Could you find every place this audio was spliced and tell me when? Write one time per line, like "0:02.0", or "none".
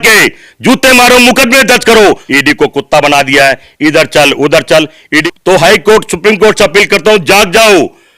0:02.2
0:05.3